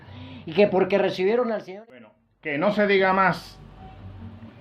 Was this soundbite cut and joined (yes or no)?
yes